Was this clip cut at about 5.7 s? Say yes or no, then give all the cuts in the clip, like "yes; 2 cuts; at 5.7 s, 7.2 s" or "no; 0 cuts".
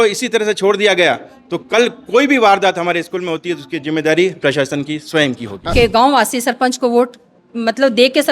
yes; 1 cut; at 5.7 s